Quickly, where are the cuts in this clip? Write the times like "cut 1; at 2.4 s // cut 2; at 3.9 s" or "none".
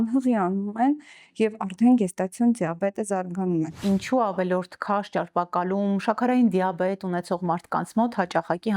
cut 1; at 3.8 s